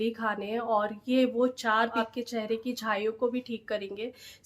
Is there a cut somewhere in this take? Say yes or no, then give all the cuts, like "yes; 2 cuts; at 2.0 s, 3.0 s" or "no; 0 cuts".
yes; 1 cut; at 1.9 s